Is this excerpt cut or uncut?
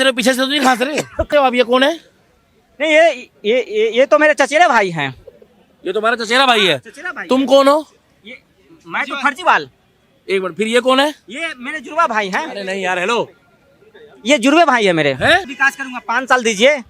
cut